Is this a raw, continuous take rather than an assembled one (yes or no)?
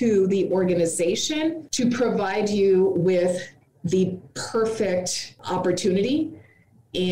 yes